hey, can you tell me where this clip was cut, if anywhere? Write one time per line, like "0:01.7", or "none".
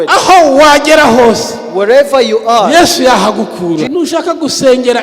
0:03.9